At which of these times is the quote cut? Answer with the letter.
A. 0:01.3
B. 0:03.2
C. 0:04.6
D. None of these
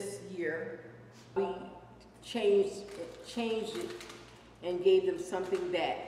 A